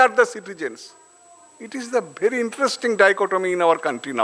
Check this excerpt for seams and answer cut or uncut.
uncut